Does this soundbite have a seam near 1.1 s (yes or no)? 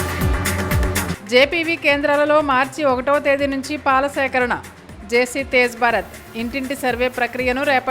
no